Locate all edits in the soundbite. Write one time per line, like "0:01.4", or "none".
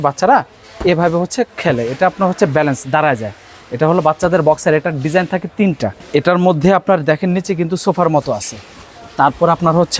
0:06.0